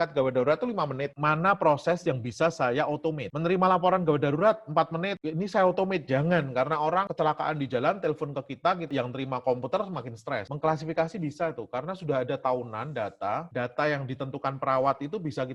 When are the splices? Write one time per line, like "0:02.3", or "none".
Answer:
0:01.1
0:07.1
0:10.5